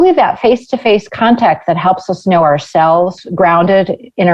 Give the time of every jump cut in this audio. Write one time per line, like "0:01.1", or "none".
0:03.2